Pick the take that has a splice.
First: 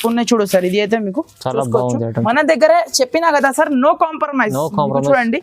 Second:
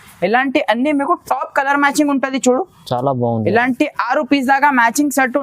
first; 1 cut; at 2.2 s

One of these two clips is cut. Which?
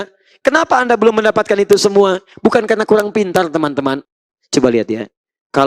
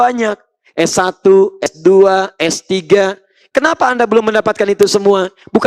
first; 1 cut; at 4.0 s

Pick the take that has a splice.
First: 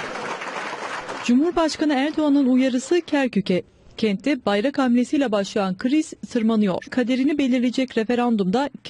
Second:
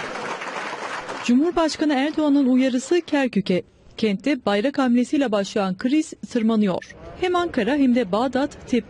second; 1 cut; at 6.9 s

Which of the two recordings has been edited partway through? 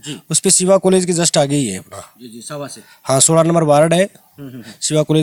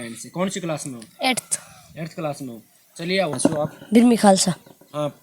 second; 1 cut; at 3.4 s

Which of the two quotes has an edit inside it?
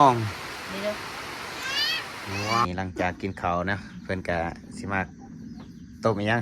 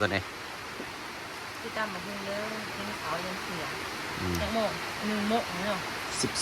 first; 1 cut; at 2.6 s

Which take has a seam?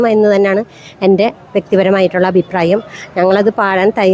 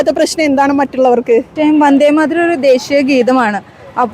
second; 1 cut; at 1.5 s

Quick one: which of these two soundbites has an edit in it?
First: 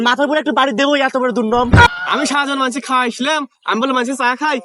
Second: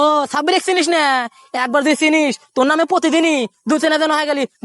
first; 1 cut; at 1.9 s

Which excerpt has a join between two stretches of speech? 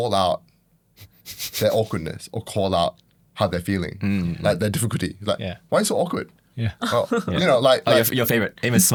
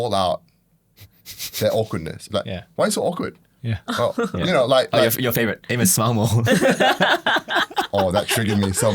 second; 1 cut; at 2.2 s

